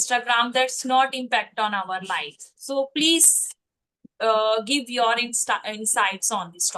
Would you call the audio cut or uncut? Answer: uncut